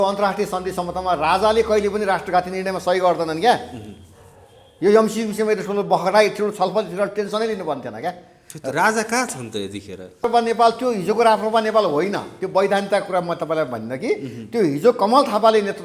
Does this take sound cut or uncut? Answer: cut